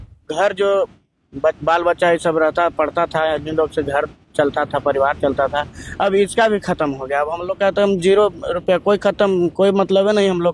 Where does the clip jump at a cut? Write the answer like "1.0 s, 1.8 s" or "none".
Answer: none